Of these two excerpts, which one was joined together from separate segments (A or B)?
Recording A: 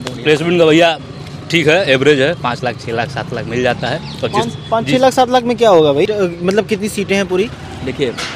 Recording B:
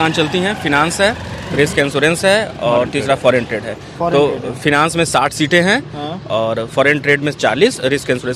A